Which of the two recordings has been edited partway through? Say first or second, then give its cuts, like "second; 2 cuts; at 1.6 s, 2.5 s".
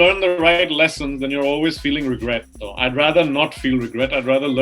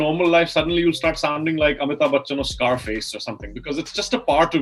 first; 1 cut; at 2.6 s